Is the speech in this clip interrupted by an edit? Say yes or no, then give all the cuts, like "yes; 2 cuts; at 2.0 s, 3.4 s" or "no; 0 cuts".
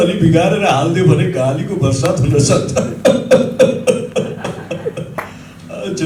no; 0 cuts